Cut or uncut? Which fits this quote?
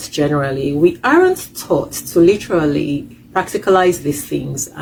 uncut